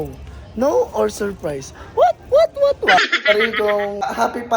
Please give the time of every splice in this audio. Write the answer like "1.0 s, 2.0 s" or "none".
3.3 s